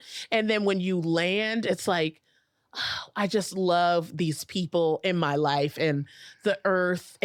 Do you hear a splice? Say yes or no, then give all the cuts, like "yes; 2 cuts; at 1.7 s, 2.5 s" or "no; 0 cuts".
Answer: no; 0 cuts